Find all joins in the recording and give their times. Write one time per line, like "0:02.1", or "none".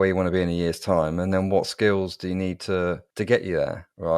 none